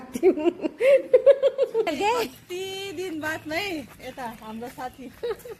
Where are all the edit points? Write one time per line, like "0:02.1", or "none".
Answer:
0:01.9